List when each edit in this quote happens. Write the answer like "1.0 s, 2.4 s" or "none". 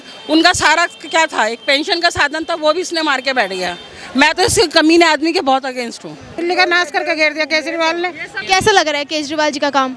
6.4 s, 8.3 s